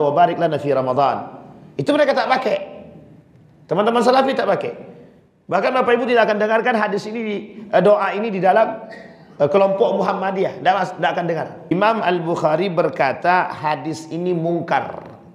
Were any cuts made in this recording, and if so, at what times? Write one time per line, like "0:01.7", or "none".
0:11.7